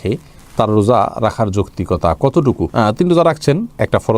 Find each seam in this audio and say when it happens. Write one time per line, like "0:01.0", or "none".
none